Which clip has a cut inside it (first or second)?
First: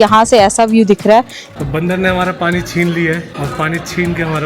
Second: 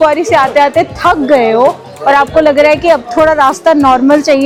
first